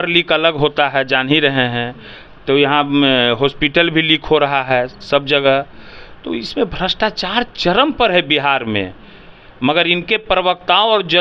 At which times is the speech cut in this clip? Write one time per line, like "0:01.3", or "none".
none